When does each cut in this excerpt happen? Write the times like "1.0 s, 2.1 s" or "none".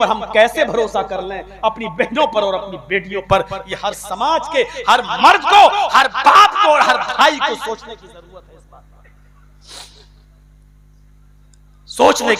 none